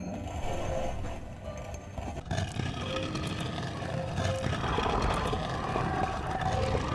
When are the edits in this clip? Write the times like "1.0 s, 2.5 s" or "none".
none